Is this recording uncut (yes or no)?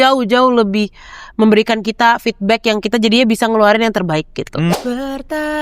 no